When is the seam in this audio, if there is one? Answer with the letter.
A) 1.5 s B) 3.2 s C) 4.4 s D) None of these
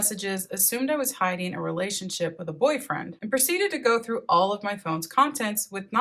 B